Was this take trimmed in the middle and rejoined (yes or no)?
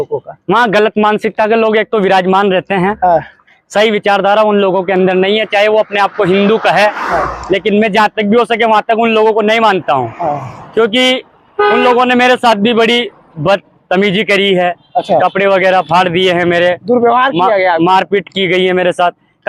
no